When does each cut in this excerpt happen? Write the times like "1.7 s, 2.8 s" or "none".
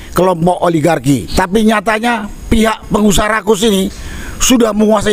1.3 s